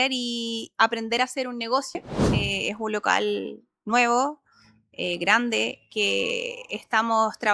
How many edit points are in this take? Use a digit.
1